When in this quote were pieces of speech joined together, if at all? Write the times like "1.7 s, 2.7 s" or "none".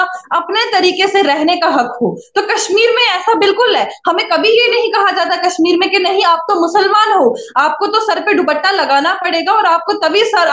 none

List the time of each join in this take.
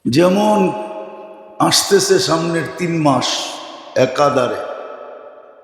none

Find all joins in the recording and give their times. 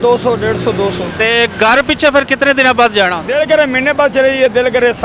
1.1 s, 3.2 s

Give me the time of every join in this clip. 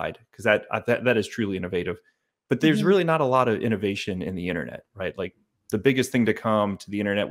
none

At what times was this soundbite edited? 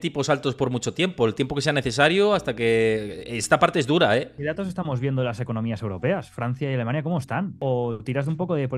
4.4 s, 7.6 s

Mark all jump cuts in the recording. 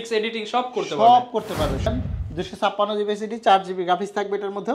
1.9 s

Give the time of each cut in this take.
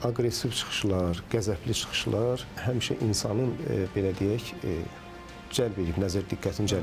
none

